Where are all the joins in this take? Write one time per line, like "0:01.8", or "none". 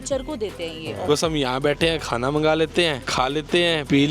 0:01.0